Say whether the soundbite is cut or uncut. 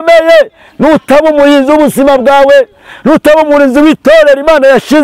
uncut